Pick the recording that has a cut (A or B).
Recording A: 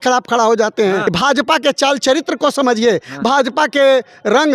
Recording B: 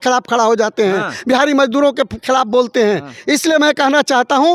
A